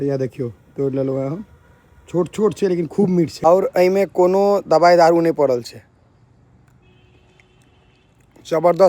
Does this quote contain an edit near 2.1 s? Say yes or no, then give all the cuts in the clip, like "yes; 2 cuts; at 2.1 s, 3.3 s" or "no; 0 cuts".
no; 1 cut; at 3.5 s